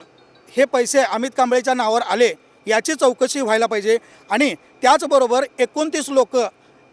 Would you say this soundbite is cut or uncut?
uncut